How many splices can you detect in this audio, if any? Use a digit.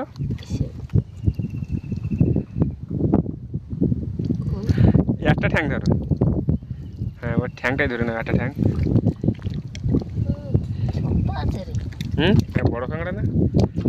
1